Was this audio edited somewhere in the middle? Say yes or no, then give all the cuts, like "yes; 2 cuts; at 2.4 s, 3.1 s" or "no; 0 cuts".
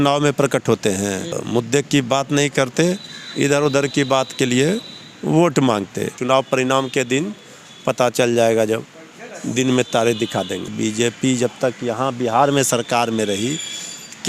yes; 3 cuts; at 1.4 s, 6.2 s, 10.7 s